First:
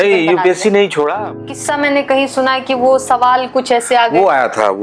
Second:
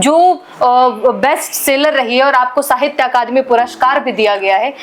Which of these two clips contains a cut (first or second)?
first